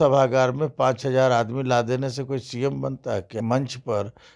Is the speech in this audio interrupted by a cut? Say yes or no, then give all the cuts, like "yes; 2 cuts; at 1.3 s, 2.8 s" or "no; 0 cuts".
yes; 1 cut; at 3.4 s